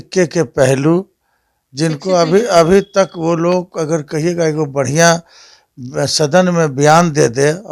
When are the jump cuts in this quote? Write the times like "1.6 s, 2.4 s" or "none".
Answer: none